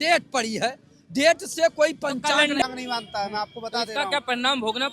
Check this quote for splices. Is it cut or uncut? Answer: cut